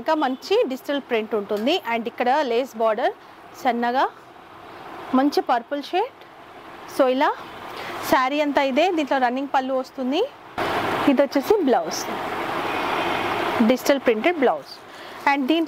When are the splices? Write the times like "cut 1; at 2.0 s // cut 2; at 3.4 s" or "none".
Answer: none